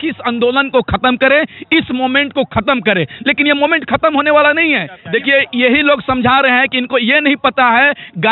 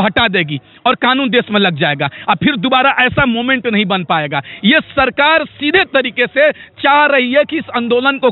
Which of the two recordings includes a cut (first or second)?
first